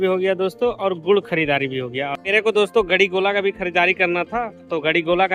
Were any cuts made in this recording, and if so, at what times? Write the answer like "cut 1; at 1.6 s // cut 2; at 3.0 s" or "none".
cut 1; at 2.2 s